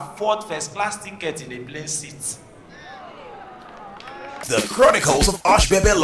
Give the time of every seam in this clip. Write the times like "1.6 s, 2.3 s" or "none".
4.5 s